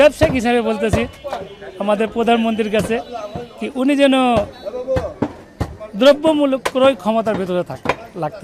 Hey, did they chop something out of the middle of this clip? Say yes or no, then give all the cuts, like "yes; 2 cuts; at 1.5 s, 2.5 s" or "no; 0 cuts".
no; 0 cuts